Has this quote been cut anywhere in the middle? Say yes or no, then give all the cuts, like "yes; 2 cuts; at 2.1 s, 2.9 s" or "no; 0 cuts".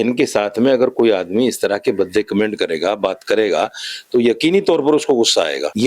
no; 0 cuts